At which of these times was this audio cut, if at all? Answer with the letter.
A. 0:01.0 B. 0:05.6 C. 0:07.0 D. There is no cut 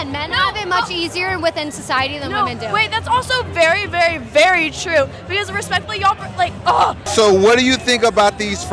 C